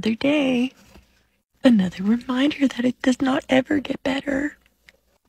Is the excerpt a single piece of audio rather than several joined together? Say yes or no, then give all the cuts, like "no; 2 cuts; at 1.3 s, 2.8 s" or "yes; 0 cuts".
yes; 0 cuts